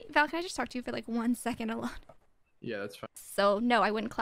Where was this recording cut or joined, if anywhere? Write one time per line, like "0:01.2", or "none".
0:03.2